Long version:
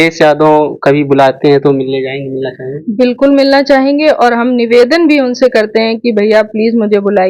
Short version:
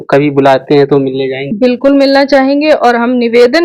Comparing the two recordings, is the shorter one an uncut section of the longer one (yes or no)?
no